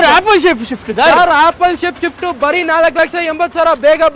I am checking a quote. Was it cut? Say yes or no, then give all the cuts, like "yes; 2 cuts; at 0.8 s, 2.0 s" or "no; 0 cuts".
no; 0 cuts